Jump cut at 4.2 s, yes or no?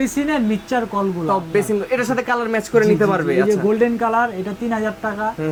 no